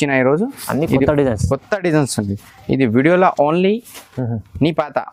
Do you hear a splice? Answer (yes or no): no